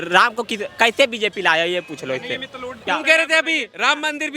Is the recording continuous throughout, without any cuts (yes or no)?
no